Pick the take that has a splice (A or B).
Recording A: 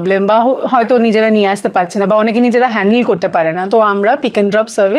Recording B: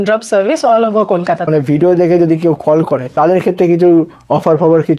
B